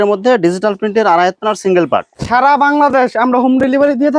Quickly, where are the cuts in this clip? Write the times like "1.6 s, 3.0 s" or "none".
2.1 s